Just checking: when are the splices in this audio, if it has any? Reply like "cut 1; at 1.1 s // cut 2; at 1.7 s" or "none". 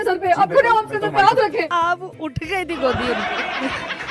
cut 1; at 1.7 s